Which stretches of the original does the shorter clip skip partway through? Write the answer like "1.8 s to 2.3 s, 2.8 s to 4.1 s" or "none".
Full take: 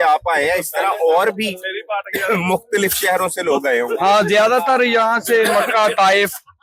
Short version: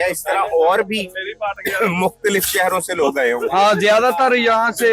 none